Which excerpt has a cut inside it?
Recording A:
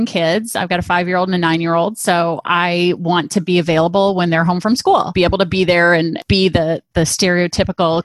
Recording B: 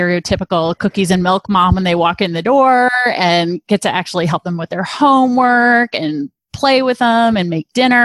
A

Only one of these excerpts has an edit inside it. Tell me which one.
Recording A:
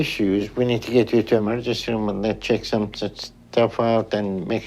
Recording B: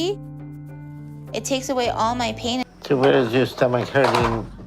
B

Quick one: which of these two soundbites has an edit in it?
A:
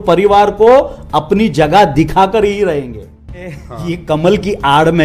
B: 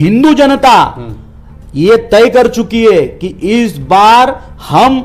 A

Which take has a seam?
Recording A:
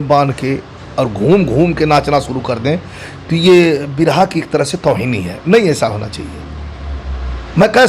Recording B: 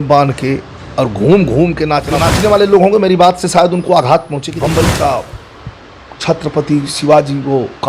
B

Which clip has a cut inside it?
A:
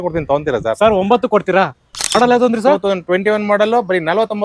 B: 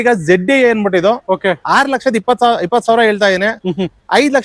A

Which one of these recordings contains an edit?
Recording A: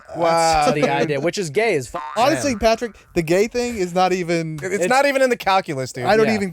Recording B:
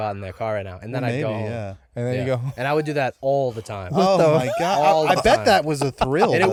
A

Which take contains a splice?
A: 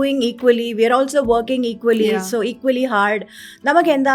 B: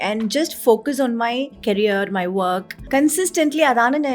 B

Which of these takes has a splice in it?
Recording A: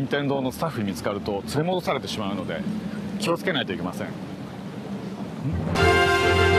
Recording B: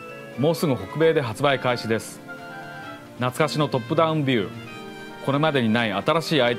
B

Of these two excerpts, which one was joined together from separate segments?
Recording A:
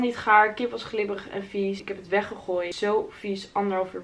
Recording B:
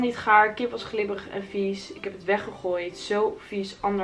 A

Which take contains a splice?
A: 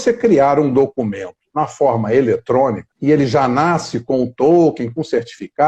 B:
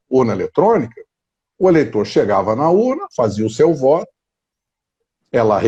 A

